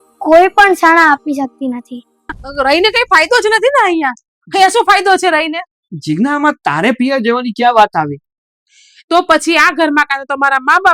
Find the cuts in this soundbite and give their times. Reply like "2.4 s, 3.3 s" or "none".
2.4 s